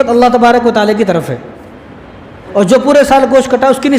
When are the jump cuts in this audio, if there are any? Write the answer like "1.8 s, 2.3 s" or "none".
2.4 s